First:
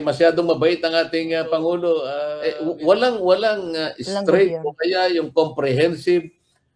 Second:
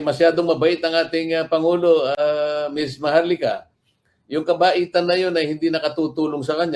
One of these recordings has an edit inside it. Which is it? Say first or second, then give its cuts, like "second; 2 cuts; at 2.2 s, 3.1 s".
first; 1 cut; at 2.1 s